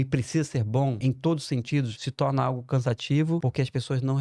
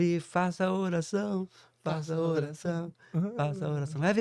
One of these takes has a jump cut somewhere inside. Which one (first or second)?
first